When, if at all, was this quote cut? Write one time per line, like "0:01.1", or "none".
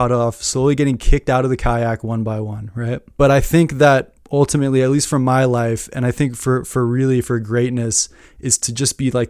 0:03.0